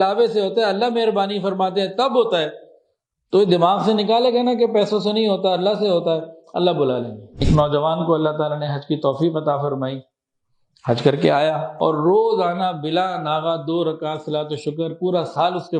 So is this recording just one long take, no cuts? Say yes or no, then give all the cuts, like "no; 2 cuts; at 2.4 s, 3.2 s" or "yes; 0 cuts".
no; 2 cuts; at 7.3 s, 11.7 s